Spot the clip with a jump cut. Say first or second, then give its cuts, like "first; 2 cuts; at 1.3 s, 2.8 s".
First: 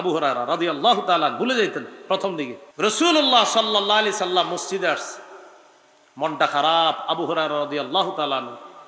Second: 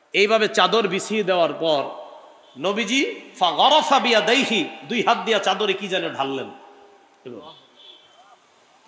first; 1 cut; at 2.6 s